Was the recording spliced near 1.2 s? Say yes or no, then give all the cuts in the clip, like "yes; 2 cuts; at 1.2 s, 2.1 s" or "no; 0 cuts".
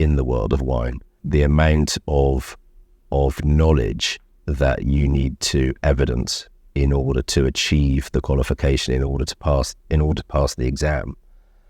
yes; 1 cut; at 1.2 s